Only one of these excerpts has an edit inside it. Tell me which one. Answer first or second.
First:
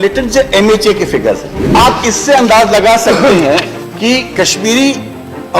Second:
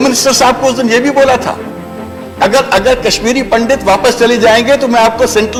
first